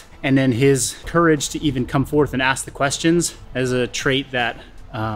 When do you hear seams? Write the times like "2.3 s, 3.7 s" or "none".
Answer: 1.0 s, 3.4 s